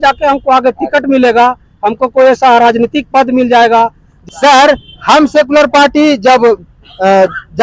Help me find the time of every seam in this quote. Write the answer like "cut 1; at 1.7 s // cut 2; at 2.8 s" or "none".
cut 1; at 4.1 s